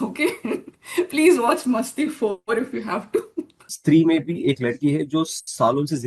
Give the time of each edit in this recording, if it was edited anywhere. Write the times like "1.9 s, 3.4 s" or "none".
3.7 s